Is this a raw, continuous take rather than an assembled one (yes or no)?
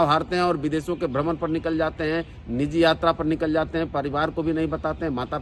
yes